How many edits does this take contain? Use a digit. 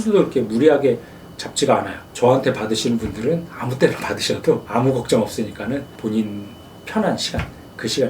2